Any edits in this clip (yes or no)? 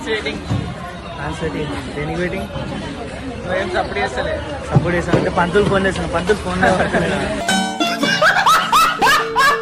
no